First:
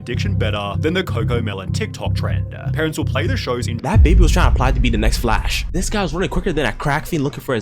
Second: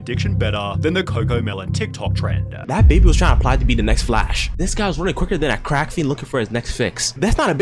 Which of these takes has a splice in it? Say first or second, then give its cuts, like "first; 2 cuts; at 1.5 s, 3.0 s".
second; 1 cut; at 2.6 s